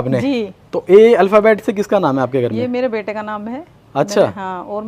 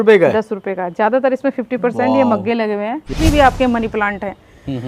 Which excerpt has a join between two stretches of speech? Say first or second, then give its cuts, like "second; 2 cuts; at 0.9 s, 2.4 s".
second; 1 cut; at 3.1 s